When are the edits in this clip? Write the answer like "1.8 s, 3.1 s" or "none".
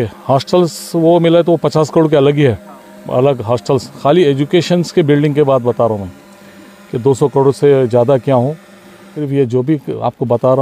9.2 s